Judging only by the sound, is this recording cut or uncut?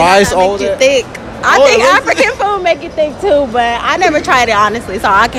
uncut